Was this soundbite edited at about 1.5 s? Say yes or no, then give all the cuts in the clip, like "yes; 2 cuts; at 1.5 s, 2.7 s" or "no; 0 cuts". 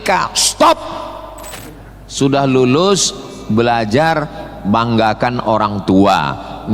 yes; 1 cut; at 1.5 s